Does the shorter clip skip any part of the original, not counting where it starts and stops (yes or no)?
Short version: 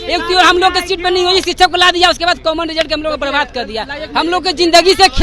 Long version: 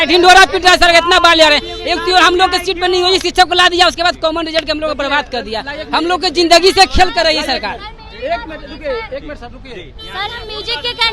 no